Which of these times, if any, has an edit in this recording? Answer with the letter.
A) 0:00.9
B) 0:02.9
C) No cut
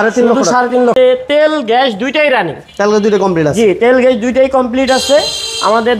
A